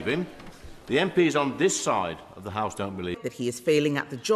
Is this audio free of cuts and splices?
no; 1 cut; at 3.2 s

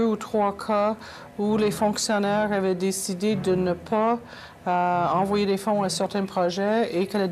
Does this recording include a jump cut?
no; 0 cuts

